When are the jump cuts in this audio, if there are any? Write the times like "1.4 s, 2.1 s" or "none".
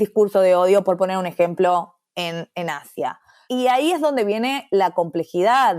3.1 s